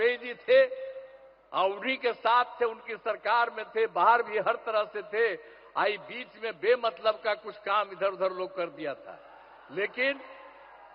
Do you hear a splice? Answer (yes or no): no